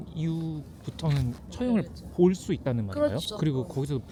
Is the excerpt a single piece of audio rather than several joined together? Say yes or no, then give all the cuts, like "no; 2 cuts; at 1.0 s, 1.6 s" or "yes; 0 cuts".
yes; 0 cuts